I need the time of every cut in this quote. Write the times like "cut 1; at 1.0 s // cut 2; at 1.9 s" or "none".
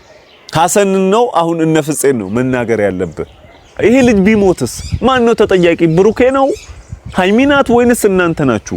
cut 1; at 3.8 s